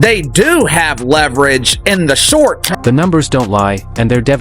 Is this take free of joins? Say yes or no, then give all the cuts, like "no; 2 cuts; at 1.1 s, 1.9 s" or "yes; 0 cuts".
no; 1 cut; at 2.8 s